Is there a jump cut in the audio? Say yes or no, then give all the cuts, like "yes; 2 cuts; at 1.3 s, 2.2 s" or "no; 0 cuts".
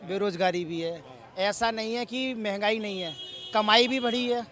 no; 0 cuts